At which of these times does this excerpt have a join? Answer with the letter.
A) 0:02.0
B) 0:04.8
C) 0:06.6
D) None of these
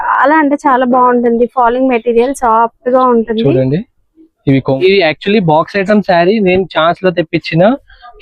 B